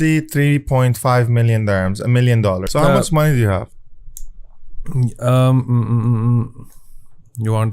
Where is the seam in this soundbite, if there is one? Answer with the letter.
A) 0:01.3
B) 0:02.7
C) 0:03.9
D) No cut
B